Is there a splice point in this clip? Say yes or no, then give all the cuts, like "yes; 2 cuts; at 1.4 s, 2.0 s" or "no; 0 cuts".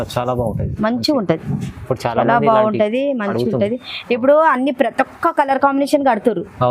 no; 0 cuts